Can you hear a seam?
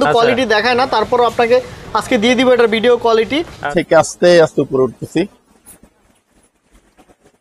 yes; 1 cut; at 3.6 s

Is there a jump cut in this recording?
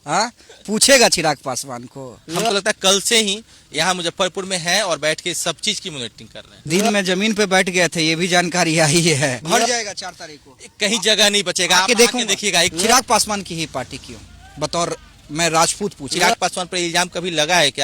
yes; 4 cuts; at 2.2 s, 9.4 s, 12.7 s, 16.1 s

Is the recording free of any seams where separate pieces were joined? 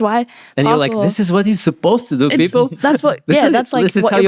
yes; 0 cuts

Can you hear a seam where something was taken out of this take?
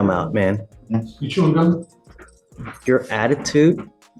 no; 0 cuts

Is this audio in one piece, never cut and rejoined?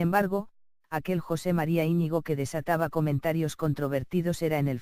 no; 1 cut; at 1.2 s

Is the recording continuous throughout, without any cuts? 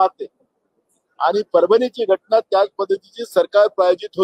yes; 0 cuts

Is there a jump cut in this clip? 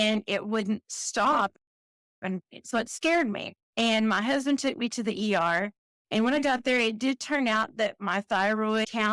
no; 0 cuts

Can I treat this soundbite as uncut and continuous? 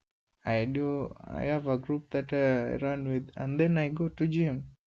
yes; 0 cuts

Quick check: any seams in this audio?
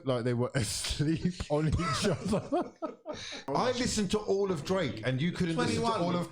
yes; 1 cut; at 3.5 s

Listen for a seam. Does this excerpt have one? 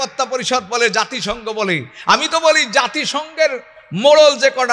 no; 0 cuts

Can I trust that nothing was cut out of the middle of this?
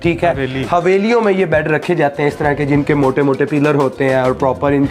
yes; 0 cuts

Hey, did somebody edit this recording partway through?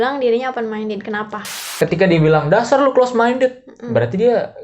yes; 1 cut; at 1.7 s

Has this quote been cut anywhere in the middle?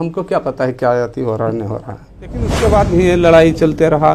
yes; 1 cut; at 2.6 s

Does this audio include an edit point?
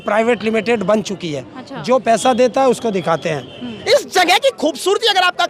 yes; 1 cut; at 3.7 s

